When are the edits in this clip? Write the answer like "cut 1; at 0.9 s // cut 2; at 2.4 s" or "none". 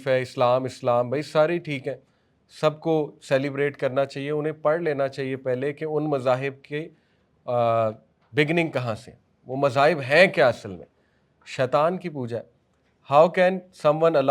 none